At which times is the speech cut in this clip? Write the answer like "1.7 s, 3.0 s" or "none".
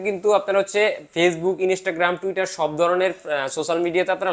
none